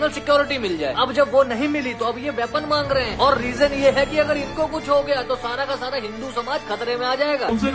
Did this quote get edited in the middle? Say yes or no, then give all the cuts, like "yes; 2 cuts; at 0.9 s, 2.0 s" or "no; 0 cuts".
no; 0 cuts